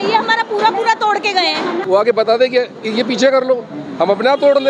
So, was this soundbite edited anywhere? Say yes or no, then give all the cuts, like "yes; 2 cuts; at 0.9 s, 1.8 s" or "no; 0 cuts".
yes; 1 cut; at 1.8 s